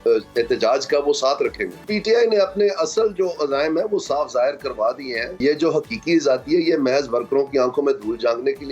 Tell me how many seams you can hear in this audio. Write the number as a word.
two